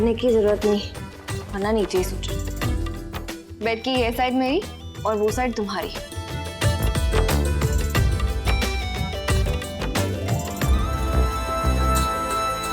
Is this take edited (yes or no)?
no